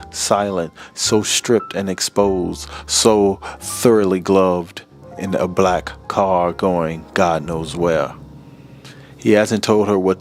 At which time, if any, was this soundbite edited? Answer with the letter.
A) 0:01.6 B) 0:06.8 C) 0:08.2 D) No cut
D